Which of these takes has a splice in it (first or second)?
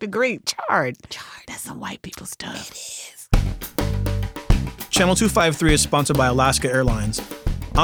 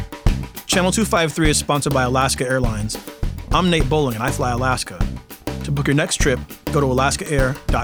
first